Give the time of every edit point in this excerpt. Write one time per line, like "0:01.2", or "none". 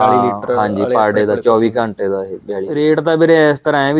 0:02.8